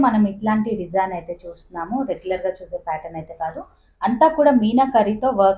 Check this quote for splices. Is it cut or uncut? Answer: uncut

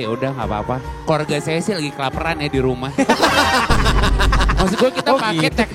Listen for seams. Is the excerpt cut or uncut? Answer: uncut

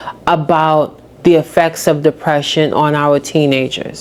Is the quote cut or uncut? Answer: uncut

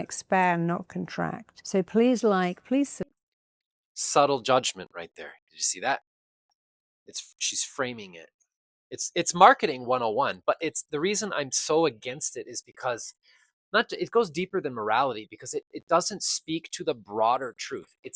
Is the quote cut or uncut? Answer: uncut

